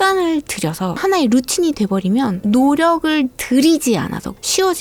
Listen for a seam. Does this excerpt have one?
no; 0 cuts

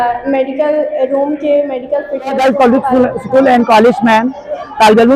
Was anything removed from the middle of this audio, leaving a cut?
yes; 1 cut; at 2.4 s

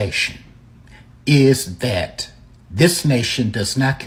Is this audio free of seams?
yes; 0 cuts

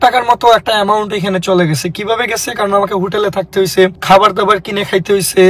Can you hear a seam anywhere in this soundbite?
yes; 1 cut; at 4.0 s

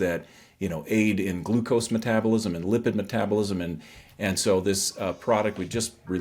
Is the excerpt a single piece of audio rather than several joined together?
yes; 0 cuts

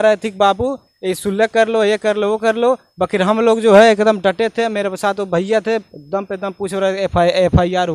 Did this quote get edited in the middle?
no; 0 cuts

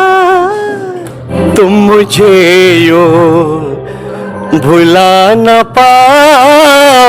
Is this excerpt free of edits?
no; 1 cut; at 1.2 s

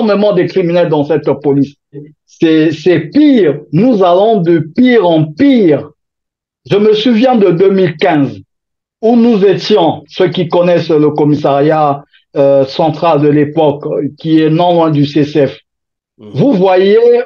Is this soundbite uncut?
no; 1 cut; at 1.9 s

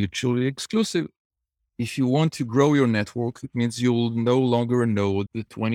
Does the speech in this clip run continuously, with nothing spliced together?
yes; 0 cuts

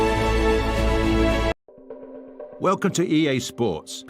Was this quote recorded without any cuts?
no; 1 cut; at 1.5 s

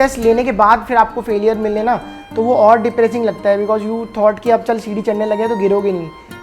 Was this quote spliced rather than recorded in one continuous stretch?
no; 0 cuts

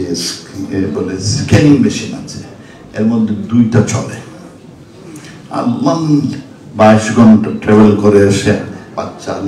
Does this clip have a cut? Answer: no; 0 cuts

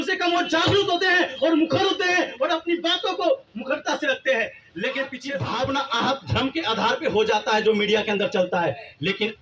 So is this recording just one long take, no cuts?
no; 1 cut; at 5.3 s

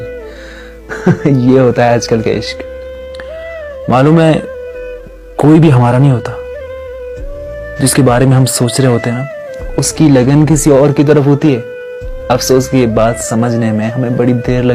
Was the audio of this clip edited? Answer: no; 0 cuts

